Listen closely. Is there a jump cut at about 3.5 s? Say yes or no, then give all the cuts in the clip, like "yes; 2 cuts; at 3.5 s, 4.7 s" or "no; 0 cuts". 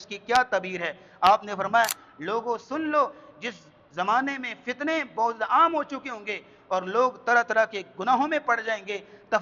no; 1 cut; at 2.0 s